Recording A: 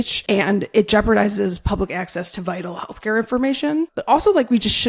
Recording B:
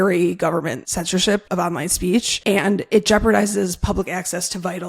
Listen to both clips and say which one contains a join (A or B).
B